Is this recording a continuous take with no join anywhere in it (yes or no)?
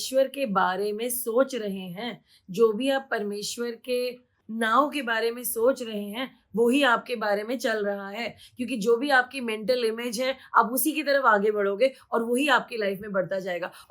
no